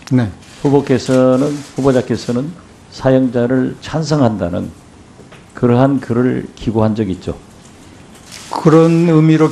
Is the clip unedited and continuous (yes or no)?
no